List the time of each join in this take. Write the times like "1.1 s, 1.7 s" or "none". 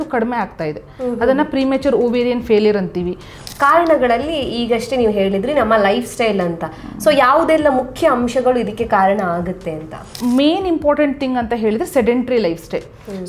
3.3 s, 10.1 s